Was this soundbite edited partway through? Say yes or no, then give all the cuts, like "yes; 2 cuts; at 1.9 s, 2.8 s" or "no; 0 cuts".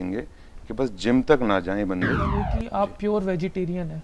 yes; 1 cut; at 2.5 s